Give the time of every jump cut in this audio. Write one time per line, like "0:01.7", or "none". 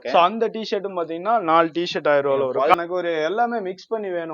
0:02.7